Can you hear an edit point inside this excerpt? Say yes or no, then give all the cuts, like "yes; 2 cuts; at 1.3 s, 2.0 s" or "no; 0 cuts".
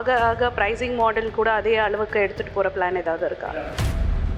no; 0 cuts